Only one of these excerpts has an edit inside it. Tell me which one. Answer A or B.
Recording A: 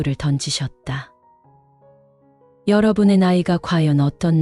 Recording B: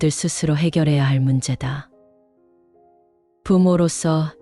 B